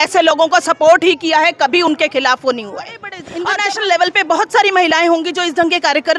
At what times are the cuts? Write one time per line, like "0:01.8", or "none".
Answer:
0:03.2